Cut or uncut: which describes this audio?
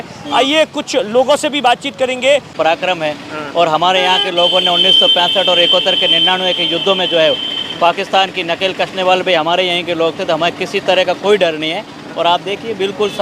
cut